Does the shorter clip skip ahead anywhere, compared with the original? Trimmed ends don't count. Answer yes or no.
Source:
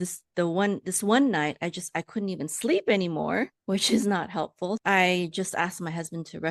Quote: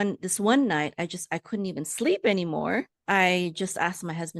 yes